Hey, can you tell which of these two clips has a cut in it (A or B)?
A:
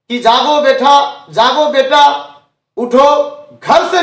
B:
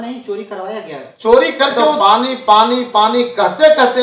B